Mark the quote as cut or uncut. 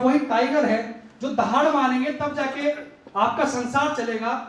uncut